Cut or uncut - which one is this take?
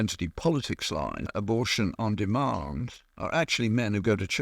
cut